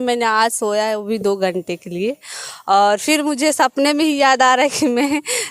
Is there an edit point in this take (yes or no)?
no